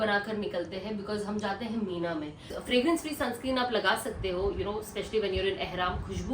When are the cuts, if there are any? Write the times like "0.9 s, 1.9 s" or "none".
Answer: 2.5 s